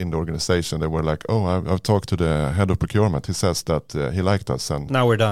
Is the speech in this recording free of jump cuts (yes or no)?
yes